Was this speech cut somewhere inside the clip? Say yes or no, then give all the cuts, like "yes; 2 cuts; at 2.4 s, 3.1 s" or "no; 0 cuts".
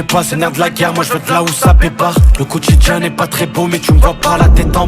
no; 0 cuts